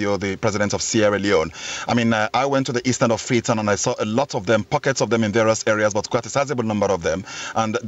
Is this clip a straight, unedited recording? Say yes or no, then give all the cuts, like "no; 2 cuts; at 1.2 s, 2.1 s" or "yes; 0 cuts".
yes; 0 cuts